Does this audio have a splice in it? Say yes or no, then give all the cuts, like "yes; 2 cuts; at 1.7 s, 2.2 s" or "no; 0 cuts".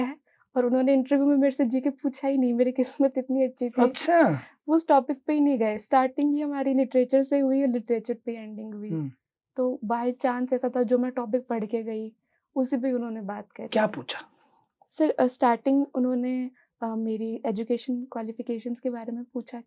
no; 0 cuts